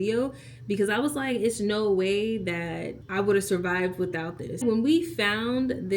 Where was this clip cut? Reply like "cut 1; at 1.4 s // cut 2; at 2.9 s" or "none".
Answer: cut 1; at 4.6 s